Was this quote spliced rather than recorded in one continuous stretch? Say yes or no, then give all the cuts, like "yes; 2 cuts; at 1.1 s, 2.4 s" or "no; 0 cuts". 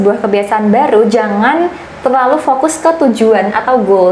no; 0 cuts